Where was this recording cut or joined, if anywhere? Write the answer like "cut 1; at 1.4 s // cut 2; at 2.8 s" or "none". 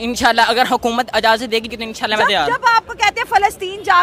cut 1; at 1.6 s